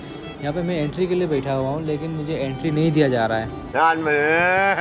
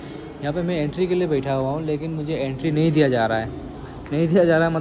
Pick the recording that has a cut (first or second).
first